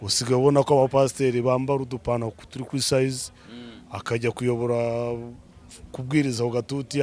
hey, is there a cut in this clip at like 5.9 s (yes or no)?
no